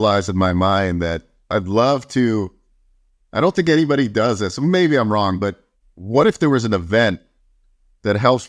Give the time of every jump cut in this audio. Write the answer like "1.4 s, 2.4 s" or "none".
1.5 s